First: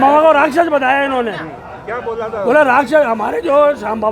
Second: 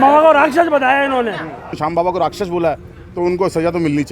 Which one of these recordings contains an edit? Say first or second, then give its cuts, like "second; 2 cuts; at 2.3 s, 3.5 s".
second; 1 cut; at 1.7 s